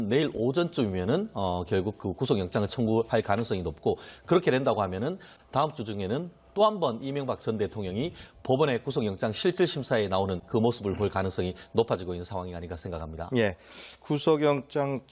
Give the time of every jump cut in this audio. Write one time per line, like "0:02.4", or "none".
0:02.5